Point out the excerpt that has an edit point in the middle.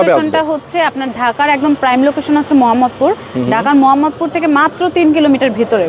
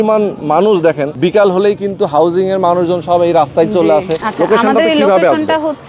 second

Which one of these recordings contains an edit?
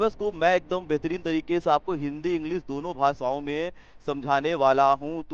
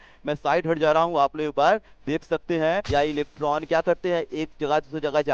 second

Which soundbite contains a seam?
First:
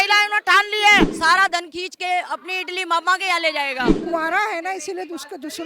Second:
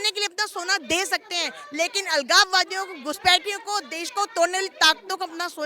first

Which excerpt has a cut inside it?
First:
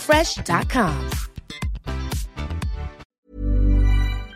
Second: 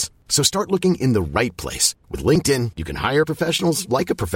first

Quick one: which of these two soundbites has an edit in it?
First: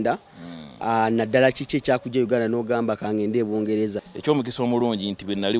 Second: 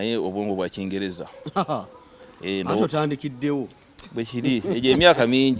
first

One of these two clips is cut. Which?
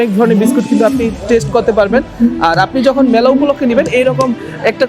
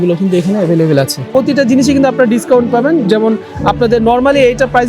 second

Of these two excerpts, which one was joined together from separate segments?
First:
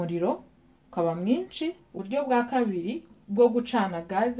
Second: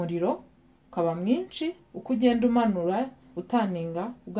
first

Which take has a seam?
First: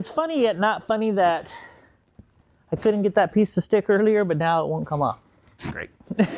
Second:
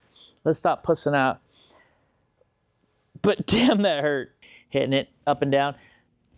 second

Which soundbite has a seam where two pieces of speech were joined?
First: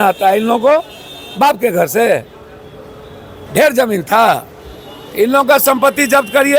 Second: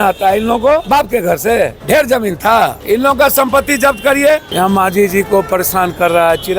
second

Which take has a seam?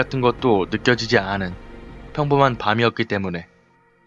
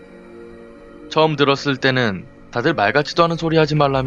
first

